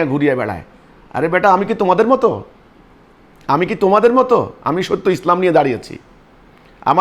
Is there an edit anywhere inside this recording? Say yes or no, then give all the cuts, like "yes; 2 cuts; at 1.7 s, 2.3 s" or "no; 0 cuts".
no; 0 cuts